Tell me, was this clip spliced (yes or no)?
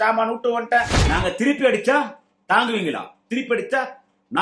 yes